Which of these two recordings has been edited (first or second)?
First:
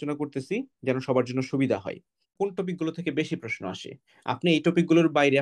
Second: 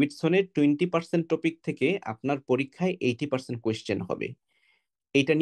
first